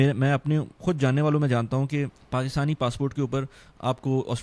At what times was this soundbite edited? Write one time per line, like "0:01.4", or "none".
0:02.2